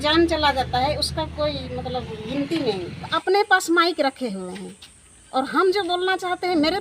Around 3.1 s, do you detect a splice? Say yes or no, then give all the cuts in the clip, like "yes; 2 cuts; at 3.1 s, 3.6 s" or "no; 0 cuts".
yes; 1 cut; at 3.1 s